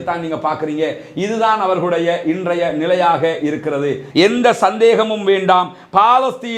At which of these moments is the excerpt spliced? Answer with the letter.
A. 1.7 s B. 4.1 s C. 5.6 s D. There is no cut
B